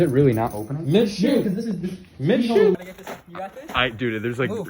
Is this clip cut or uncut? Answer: cut